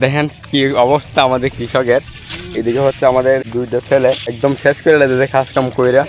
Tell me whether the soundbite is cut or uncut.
cut